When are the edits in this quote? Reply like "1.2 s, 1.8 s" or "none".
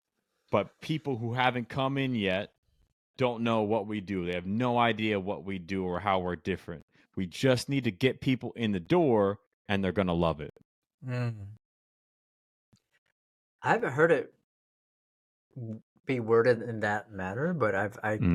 none

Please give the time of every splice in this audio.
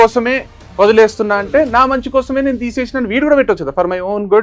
none

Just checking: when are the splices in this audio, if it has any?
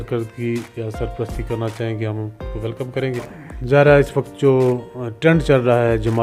none

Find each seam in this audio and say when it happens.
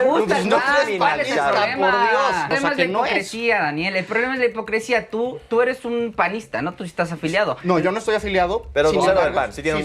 2.5 s

